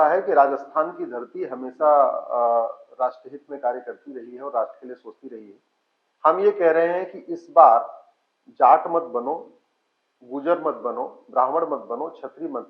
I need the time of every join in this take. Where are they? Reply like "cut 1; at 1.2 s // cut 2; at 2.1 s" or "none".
none